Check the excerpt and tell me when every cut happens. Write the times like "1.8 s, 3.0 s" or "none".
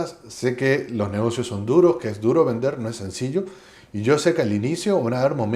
none